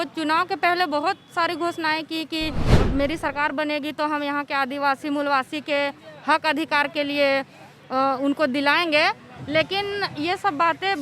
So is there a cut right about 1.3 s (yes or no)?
no